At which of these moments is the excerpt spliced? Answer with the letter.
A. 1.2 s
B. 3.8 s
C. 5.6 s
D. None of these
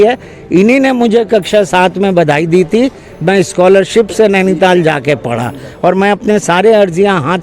D